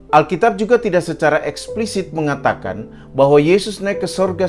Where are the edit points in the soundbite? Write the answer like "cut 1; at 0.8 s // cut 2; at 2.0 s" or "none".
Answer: none